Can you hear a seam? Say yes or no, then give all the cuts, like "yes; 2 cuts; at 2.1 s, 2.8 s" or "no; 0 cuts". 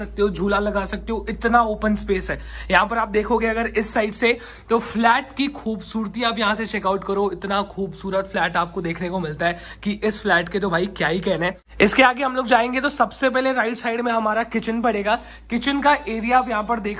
no; 0 cuts